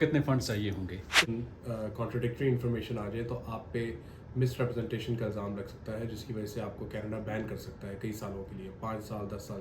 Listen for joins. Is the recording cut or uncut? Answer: cut